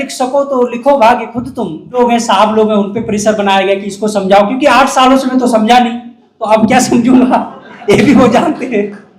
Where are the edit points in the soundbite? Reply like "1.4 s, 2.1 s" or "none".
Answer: 2.0 s

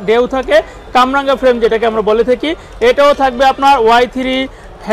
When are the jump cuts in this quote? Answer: none

